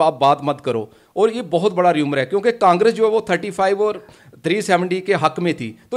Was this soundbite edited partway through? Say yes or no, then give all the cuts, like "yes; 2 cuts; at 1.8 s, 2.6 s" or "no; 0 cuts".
no; 0 cuts